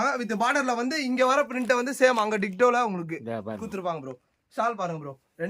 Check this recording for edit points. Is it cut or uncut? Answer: uncut